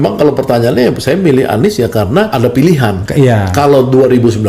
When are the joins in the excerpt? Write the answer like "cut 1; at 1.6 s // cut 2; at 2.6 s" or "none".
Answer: cut 1; at 2.3 s // cut 2; at 3.0 s